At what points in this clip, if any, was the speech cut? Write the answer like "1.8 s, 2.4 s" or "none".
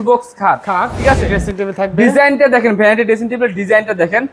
1.3 s